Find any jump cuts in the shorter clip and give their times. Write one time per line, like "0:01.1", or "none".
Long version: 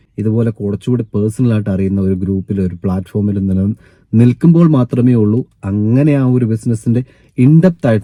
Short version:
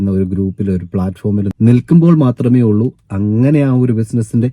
0:01.5